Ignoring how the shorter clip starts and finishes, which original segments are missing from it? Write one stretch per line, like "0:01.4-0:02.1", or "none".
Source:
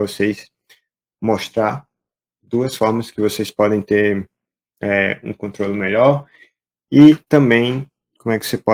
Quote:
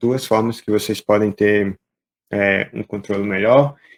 none